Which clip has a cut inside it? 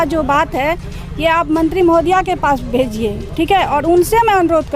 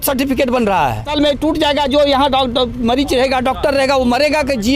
second; 1 cut; at 1.1 s

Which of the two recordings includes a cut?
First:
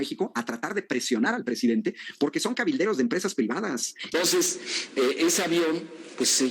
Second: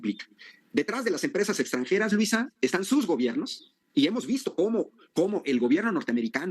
first; 1 cut; at 4.0 s

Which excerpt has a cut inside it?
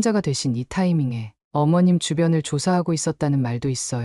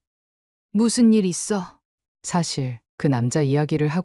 first; 1 cut; at 1.3 s

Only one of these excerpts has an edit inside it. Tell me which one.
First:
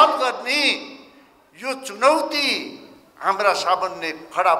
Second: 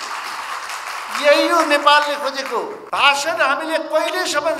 second; 1 cut; at 2.8 s

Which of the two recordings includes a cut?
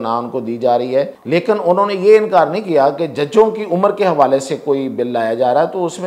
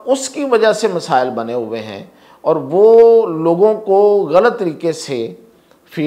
first; 1 cut; at 1.2 s

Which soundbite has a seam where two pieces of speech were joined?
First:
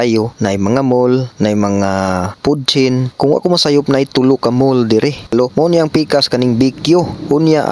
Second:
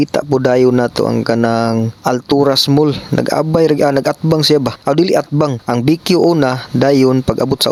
first; 1 cut; at 5.3 s

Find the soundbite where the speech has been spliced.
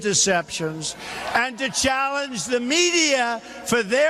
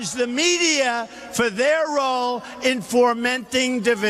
second; 1 cut; at 3.1 s

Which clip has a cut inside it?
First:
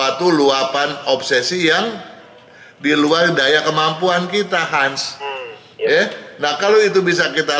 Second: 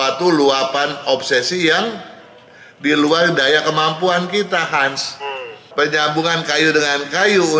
second; 1 cut; at 5.7 s

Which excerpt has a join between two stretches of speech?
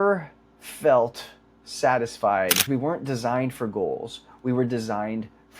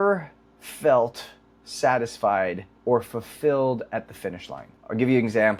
first; 1 cut; at 2.7 s

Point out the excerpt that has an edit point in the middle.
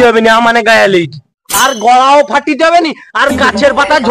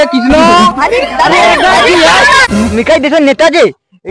second; 1 cut; at 2.4 s

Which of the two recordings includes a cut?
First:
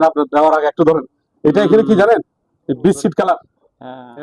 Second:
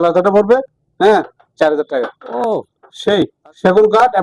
second; 1 cut; at 2.2 s

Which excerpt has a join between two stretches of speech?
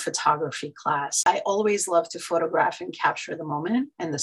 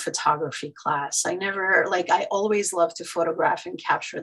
first; 1 cut; at 1.2 s

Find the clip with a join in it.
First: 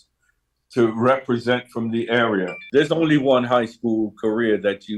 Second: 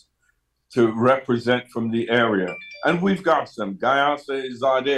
first; 1 cut; at 2.6 s

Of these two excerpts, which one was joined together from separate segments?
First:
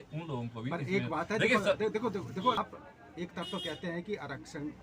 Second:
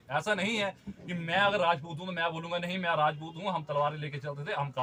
first; 1 cut; at 2.6 s

